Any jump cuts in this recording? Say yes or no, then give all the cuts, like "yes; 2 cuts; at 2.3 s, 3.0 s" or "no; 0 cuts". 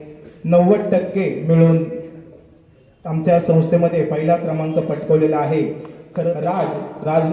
yes; 1 cut; at 6.1 s